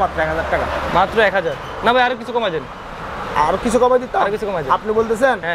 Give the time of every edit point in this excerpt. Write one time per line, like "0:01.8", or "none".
none